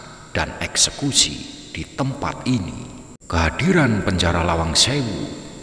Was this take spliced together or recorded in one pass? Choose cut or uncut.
cut